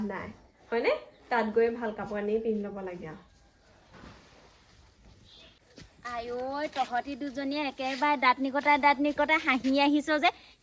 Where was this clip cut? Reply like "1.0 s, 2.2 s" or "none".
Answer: 5.6 s